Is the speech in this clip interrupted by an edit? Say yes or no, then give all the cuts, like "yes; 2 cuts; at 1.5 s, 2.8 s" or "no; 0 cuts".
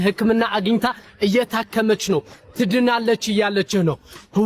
no; 0 cuts